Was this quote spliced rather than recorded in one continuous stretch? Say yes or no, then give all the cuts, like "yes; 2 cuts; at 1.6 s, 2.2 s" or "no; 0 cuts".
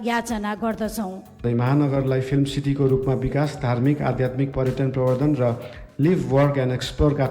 yes; 1 cut; at 1.4 s